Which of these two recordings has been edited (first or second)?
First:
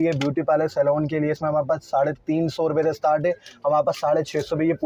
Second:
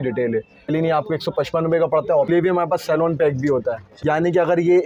second